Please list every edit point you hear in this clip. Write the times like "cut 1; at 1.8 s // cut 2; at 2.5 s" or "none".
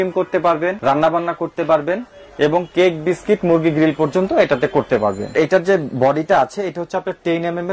cut 1; at 0.8 s // cut 2; at 5.3 s